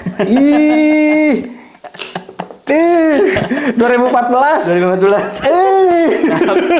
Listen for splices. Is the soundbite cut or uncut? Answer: uncut